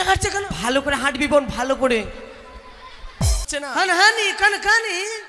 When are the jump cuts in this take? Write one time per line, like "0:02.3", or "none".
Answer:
0:03.5